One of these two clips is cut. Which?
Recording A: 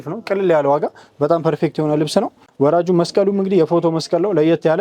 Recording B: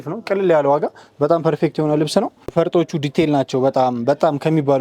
A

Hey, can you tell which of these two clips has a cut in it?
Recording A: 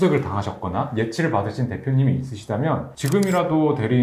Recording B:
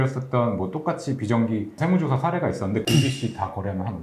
B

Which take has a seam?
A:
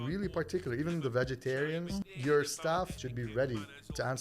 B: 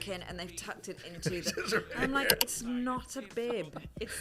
A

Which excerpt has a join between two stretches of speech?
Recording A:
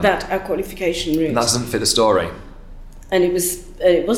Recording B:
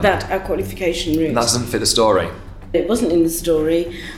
B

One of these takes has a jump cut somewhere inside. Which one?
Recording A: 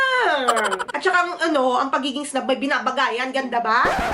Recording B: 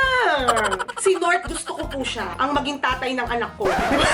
A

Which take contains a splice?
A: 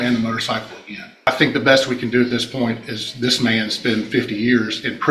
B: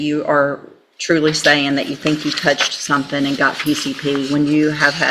A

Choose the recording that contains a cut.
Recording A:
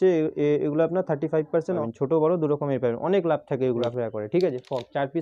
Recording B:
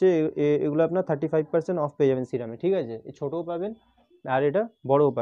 A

